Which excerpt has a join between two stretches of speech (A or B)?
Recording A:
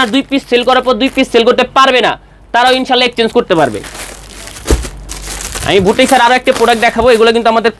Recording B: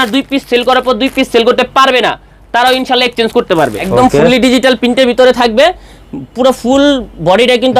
B